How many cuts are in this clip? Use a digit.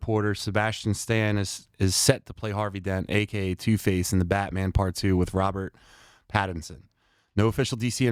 0